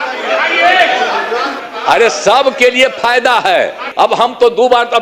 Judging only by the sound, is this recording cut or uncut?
cut